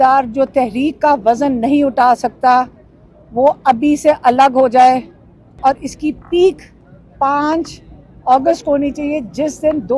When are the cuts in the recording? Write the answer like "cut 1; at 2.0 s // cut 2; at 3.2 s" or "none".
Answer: cut 1; at 5.6 s